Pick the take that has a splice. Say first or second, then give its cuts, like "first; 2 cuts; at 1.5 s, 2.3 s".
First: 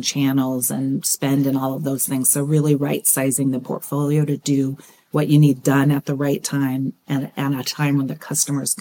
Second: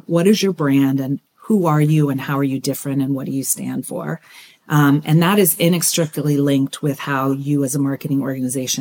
first; 1 cut; at 7.0 s